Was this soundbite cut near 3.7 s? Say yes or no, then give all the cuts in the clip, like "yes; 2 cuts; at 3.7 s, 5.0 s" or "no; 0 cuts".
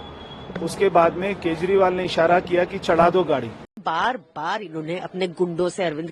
yes; 1 cut; at 3.7 s